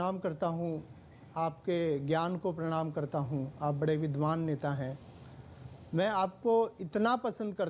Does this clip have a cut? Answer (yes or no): no